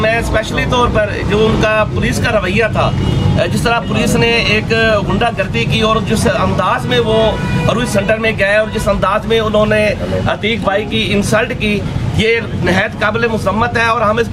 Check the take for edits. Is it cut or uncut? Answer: uncut